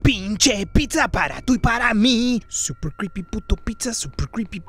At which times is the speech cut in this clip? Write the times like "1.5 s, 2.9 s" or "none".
2.5 s